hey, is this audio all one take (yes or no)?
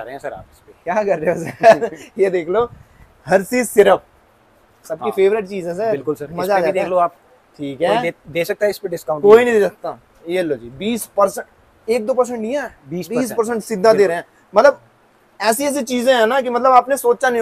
yes